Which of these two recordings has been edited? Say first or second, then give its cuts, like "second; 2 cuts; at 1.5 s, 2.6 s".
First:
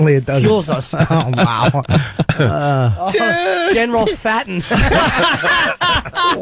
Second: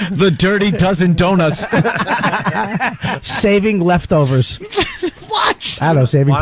second; 1 cut; at 4.6 s